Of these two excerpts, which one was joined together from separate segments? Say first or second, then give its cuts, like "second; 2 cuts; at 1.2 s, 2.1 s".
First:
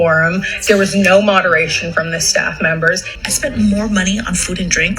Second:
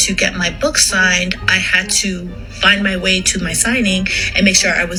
first; 1 cut; at 3.1 s